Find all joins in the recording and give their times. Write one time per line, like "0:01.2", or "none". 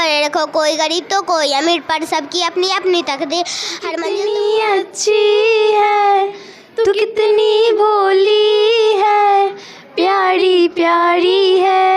0:03.8